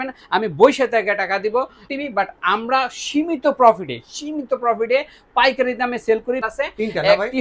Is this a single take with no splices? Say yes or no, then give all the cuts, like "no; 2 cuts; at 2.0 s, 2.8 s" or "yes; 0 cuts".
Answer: no; 2 cuts; at 1.9 s, 6.5 s